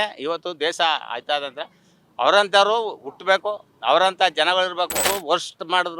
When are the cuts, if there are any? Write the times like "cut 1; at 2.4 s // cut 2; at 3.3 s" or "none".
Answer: cut 1; at 5.1 s

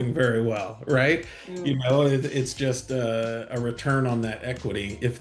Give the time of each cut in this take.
none

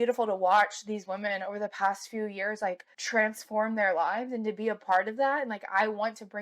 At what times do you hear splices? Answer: none

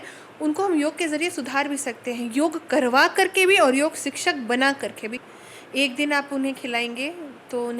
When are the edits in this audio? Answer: cut 1; at 5.3 s

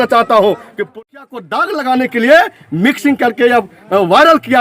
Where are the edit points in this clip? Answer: cut 1; at 1.0 s

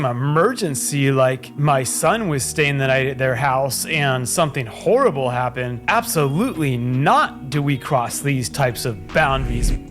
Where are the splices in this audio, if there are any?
cut 1; at 1.5 s // cut 2; at 5.7 s

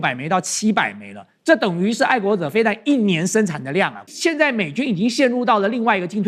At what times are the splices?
cut 1; at 4.0 s

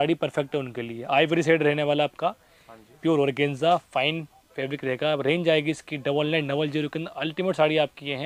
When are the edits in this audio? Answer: none

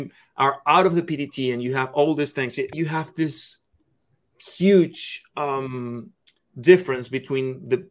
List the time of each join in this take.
cut 1; at 2.7 s

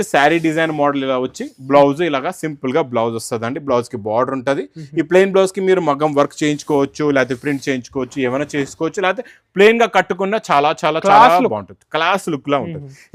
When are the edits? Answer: none

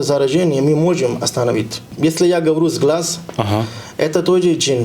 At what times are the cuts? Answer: cut 1; at 1.8 s

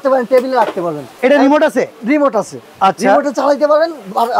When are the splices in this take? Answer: cut 1; at 1.1 s // cut 2; at 2.6 s

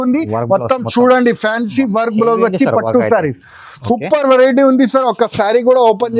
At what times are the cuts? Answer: none

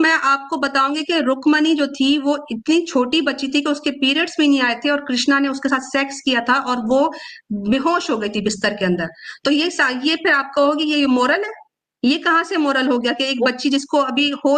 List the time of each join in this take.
none

